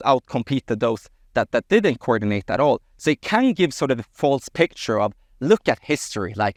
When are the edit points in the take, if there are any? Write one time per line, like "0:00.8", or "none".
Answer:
none